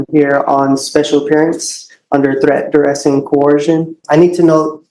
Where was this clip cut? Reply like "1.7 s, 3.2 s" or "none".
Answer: 4.0 s